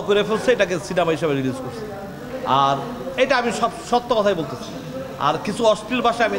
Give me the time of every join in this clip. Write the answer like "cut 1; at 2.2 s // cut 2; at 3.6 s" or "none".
none